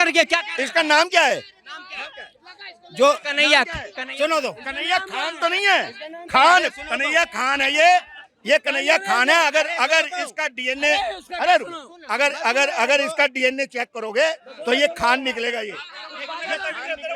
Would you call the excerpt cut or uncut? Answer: uncut